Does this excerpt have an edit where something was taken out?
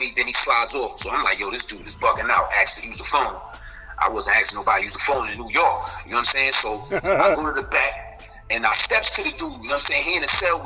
no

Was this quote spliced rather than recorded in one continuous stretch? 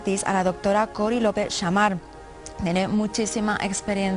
yes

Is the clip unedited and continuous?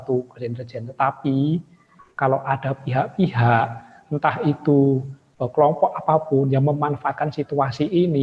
yes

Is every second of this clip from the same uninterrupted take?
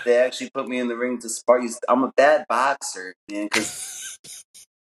yes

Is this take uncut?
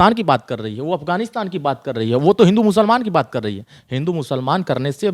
yes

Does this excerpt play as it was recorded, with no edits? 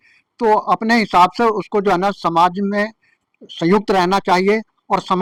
yes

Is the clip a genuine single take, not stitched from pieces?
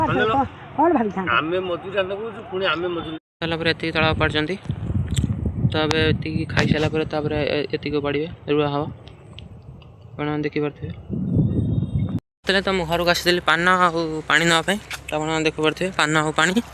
no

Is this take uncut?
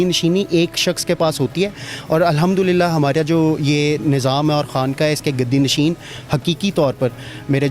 yes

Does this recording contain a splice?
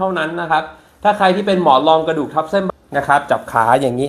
yes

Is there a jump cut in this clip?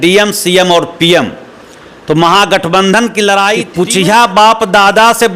yes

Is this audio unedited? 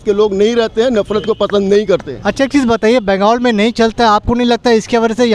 yes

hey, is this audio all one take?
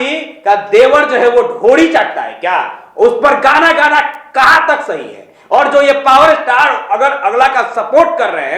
yes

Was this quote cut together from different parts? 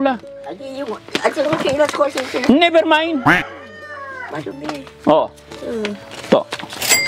no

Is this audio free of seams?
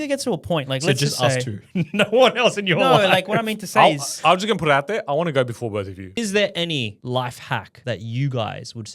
no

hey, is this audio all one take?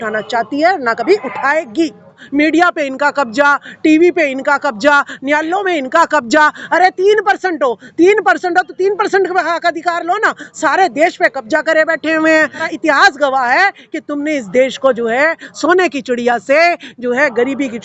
no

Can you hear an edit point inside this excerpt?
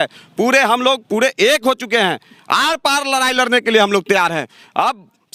no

